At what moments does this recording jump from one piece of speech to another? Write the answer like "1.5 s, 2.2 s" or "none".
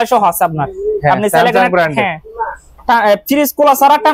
none